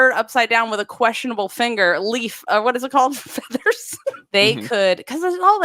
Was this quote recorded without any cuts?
no; 1 cut; at 4.2 s

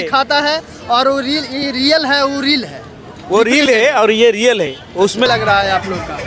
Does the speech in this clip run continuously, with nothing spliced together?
no; 1 cut; at 5.3 s

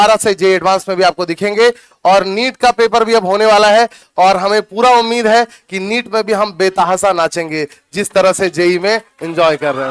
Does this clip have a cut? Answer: no; 0 cuts

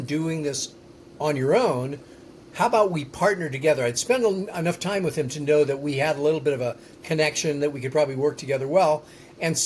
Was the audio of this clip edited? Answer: no; 0 cuts

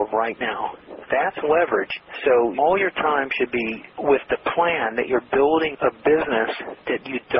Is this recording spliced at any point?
yes; 1 cut; at 2.0 s

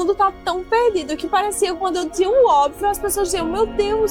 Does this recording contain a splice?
no; 0 cuts

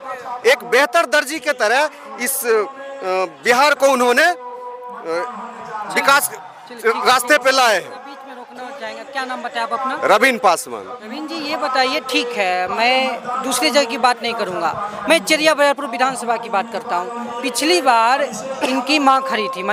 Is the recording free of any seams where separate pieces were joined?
yes; 0 cuts

